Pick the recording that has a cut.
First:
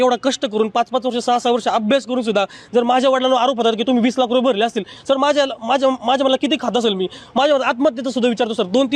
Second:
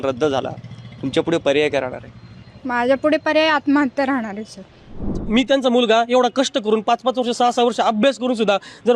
second; 1 cut; at 5.2 s

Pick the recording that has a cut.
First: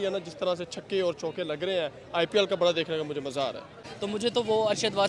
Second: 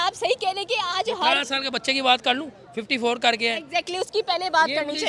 first; 1 cut; at 3.9 s

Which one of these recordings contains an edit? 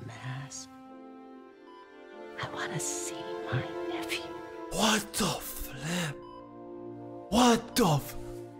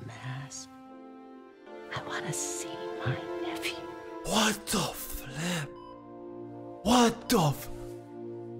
second; 1 cut; at 1.7 s

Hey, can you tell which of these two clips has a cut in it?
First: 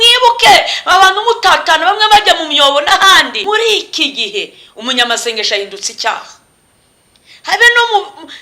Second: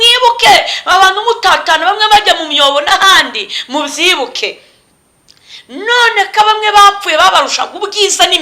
first; 1 cut; at 3.3 s

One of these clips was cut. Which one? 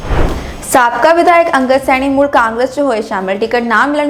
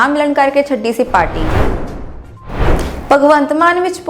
second; 2 cuts; at 1.4 s, 3.0 s

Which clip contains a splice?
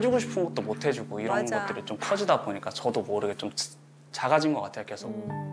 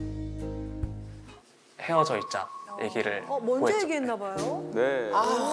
second; 1 cut; at 1.1 s

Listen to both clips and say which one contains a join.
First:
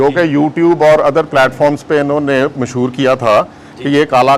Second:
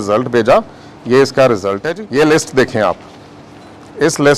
second; 1 cut; at 1.9 s

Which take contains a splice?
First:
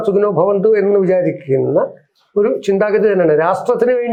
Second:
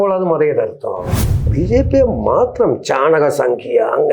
second; 1 cut; at 1.5 s

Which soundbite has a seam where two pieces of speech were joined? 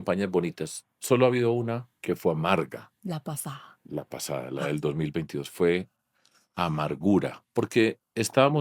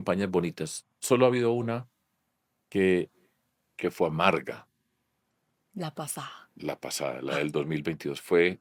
first; 3 cuts; at 1.9 s, 2.9 s, 7.4 s

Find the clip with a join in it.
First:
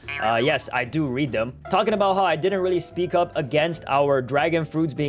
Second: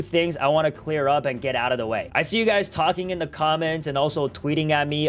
second; 1 cut; at 2.1 s

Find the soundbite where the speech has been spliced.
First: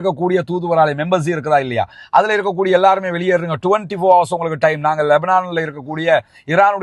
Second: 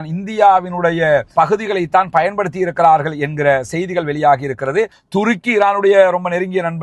second; 1 cut; at 5.0 s

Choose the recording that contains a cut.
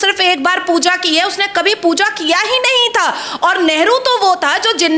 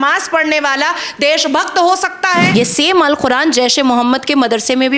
second; 1 cut; at 2.5 s

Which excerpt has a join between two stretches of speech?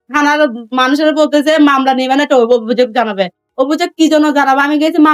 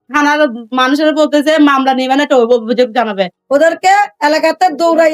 second; 1 cut; at 3.3 s

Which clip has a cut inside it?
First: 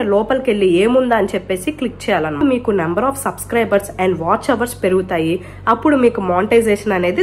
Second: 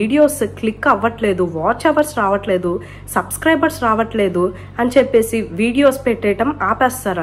first; 1 cut; at 2.4 s

